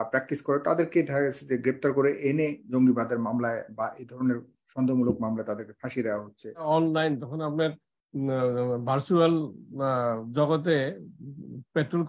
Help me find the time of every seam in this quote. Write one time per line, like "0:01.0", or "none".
0:06.6